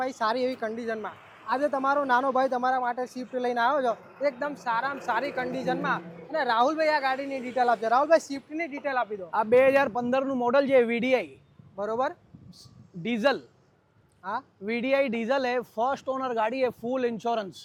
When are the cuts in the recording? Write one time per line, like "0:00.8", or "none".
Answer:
none